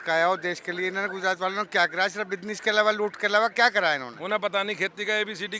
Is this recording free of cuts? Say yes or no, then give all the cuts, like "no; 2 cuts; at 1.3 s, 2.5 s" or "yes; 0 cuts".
no; 1 cut; at 4.1 s